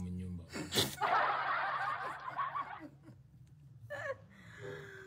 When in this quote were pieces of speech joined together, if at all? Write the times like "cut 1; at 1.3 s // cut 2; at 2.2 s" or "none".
cut 1; at 0.9 s // cut 2; at 2.7 s